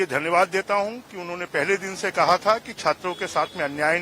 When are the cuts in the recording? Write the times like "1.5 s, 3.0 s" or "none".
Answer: none

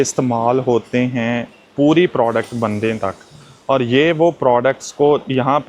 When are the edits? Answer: none

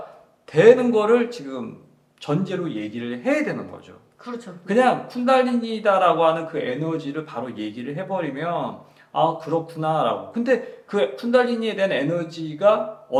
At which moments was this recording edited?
none

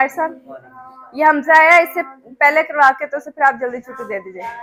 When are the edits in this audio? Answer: none

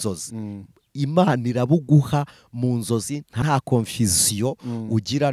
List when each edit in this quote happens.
3.4 s

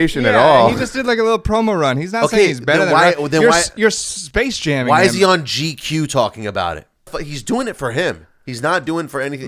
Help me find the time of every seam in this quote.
7.3 s

